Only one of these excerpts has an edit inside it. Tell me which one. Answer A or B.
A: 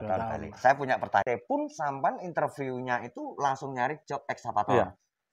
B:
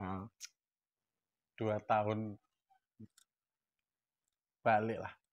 A